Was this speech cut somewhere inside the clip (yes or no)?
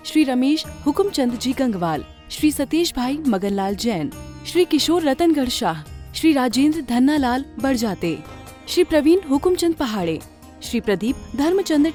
no